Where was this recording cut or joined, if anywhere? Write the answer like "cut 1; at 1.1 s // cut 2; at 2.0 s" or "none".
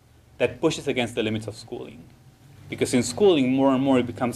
cut 1; at 2.7 s